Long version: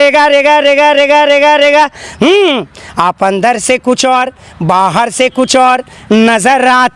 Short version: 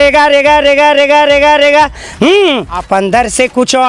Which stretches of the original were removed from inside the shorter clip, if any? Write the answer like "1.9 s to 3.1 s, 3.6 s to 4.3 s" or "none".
2.8 s to 3.1 s